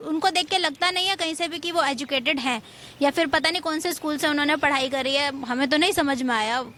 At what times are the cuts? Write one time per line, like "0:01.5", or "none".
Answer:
none